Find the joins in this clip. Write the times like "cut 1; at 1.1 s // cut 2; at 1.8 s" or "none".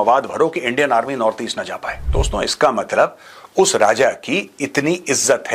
cut 1; at 1.9 s